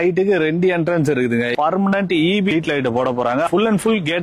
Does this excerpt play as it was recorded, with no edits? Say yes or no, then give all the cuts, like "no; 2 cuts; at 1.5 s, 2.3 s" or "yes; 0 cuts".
no; 3 cuts; at 1.5 s, 2.5 s, 3.5 s